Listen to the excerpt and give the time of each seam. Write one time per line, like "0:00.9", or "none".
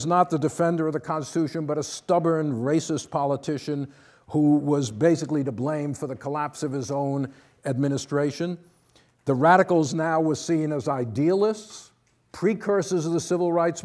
0:02.2